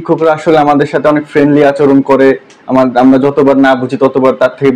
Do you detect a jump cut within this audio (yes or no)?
no